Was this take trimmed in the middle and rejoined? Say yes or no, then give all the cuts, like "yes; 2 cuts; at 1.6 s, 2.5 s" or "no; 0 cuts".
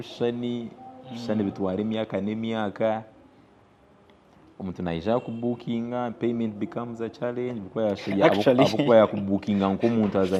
no; 0 cuts